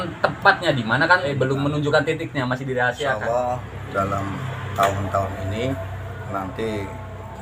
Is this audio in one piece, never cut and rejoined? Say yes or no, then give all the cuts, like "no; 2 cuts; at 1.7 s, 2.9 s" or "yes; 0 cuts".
no; 2 cuts; at 1.3 s, 3.2 s